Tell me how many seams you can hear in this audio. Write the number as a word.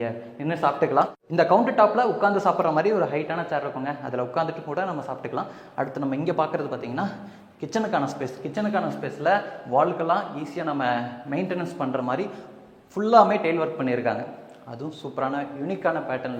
zero